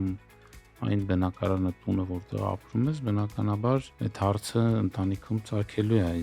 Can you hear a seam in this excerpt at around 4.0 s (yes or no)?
yes